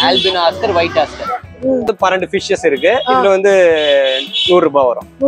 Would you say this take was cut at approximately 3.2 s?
no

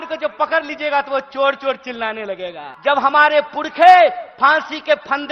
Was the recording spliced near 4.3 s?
no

